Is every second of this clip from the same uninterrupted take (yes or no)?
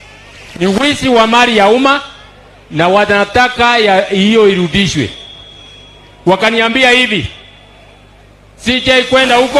yes